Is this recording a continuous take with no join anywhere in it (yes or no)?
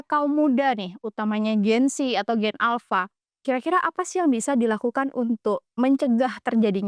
yes